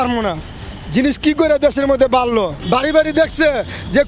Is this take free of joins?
no; 1 cut; at 2.6 s

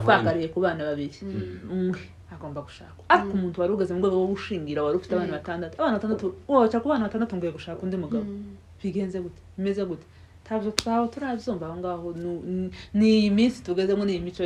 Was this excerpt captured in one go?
yes; 0 cuts

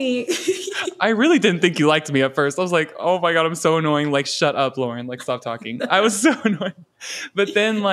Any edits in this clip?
no; 0 cuts

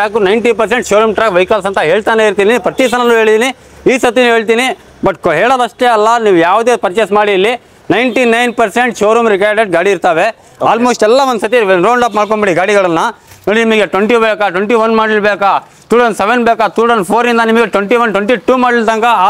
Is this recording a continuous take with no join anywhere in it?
yes; 0 cuts

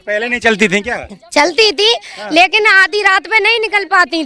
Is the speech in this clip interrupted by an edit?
no; 0 cuts

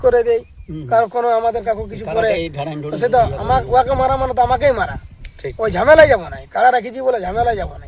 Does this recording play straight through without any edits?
no; 1 cut; at 1.6 s

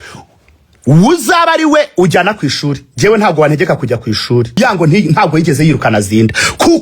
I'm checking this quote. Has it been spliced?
yes; 1 cut; at 4.6 s

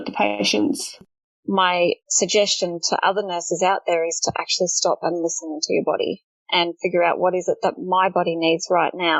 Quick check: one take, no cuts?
no; 2 cuts; at 1.0 s, 2.1 s

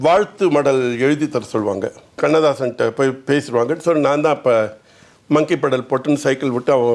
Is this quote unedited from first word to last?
no; 1 cut; at 2.2 s

